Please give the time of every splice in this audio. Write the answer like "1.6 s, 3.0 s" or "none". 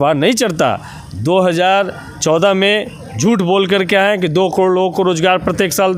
none